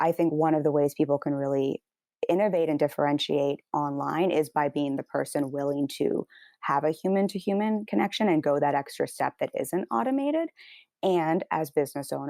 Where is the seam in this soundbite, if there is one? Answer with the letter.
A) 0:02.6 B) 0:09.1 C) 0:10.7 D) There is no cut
D